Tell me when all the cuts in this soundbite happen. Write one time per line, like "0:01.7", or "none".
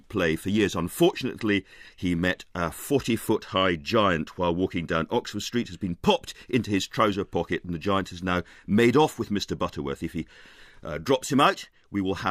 0:04.3